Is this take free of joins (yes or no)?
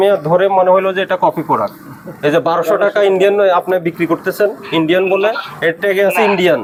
yes